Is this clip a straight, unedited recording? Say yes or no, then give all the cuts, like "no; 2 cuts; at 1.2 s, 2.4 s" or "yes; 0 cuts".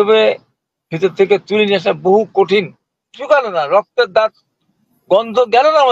no; 1 cut; at 3.1 s